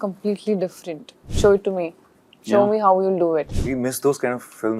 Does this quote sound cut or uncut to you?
cut